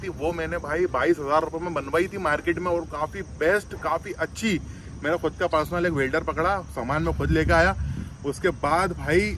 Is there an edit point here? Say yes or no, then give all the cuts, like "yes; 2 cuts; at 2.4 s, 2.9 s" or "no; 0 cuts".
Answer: no; 0 cuts